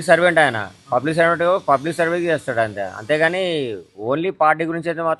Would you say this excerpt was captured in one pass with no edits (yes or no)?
yes